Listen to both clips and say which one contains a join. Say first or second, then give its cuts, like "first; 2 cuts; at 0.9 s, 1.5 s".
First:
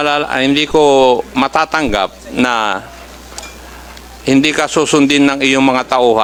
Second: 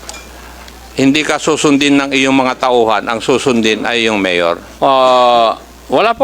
second; 1 cut; at 4.7 s